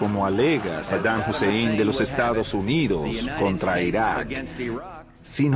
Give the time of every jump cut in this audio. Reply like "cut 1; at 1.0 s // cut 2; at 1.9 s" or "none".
cut 1; at 4.3 s